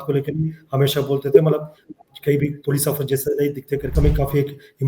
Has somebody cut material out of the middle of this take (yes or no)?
yes